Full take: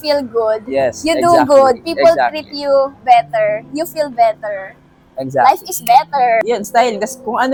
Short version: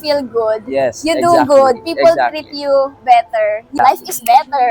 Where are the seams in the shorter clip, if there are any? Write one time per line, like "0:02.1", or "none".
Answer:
0:03.7